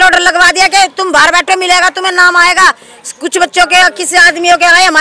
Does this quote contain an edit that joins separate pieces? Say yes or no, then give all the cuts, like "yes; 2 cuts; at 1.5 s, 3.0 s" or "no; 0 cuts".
no; 0 cuts